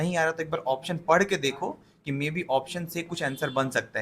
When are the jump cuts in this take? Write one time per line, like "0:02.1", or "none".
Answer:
none